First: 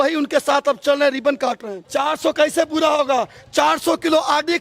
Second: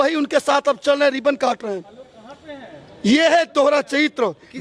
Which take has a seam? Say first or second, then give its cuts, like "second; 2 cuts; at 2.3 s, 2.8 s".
first; 1 cut; at 1.9 s